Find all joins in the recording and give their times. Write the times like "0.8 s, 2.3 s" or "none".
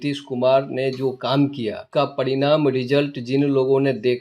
1.8 s